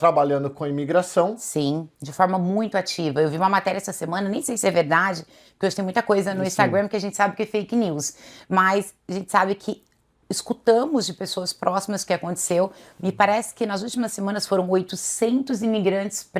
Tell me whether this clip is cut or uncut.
uncut